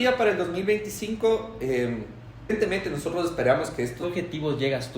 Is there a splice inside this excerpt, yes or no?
yes